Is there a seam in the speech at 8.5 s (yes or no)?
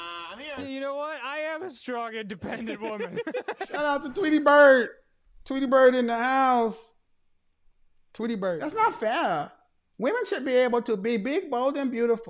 yes